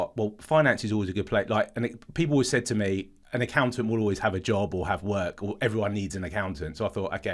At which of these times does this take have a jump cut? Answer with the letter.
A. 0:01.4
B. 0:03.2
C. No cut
B